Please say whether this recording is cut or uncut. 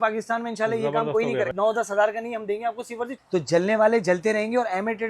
cut